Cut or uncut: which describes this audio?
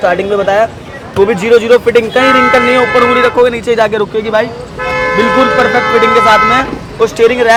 uncut